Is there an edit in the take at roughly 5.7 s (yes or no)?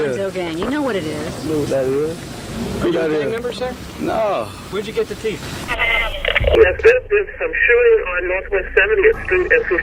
yes